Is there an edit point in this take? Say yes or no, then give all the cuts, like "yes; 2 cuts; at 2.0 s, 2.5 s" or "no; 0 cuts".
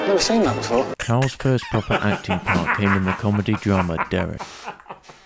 no; 0 cuts